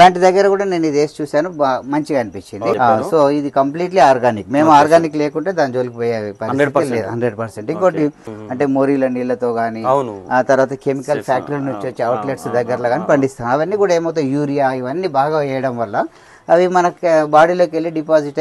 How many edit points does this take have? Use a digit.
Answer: 2